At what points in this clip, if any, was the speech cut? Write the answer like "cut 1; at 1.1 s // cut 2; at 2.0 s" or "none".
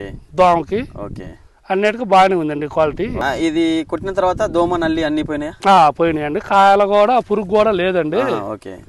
cut 1; at 3.2 s

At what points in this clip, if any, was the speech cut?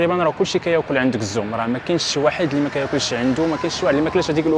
none

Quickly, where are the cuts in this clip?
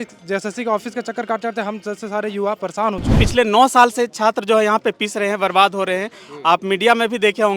cut 1; at 3.1 s

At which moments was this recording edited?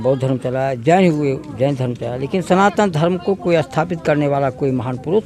none

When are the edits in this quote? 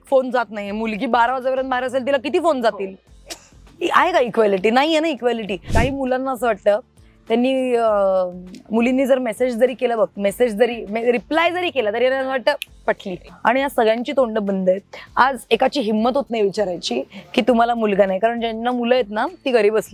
cut 1; at 5.7 s // cut 2; at 13.2 s

